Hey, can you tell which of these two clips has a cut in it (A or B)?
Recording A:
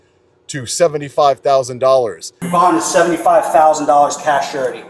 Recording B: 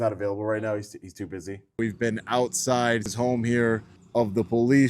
B